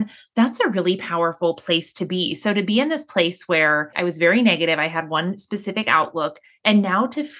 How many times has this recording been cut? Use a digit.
1